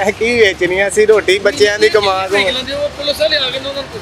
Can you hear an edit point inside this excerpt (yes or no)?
no